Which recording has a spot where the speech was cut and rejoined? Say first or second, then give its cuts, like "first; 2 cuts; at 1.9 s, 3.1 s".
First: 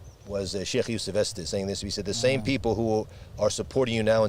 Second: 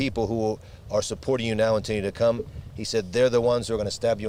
first; 1 cut; at 1.4 s